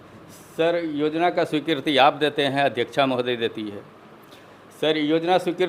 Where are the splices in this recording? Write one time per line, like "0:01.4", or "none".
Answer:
none